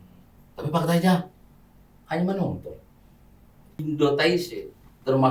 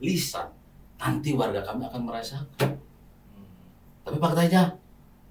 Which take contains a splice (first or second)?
first